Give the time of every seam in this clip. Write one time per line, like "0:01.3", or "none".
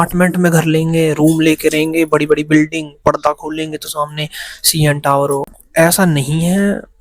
0:05.6